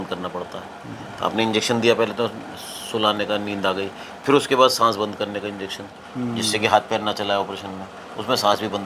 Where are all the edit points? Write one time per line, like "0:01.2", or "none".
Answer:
none